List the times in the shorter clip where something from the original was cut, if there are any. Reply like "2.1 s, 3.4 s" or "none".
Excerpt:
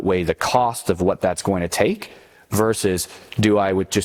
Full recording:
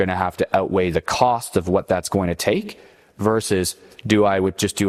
none